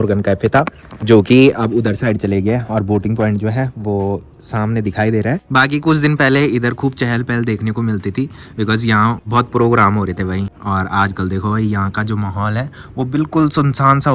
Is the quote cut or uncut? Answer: uncut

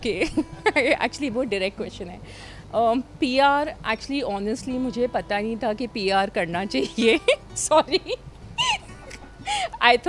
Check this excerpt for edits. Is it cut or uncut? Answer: uncut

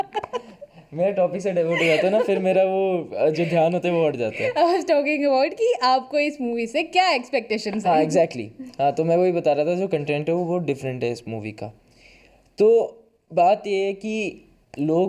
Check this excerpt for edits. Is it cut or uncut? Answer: uncut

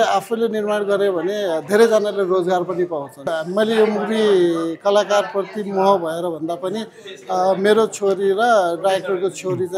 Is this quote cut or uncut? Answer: cut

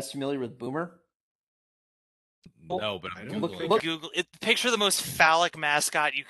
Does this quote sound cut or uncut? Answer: cut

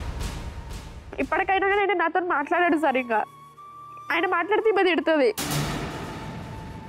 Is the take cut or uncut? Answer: cut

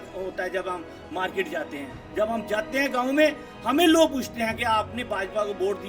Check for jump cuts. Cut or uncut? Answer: uncut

